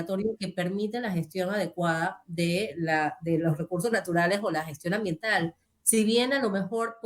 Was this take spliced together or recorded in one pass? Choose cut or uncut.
cut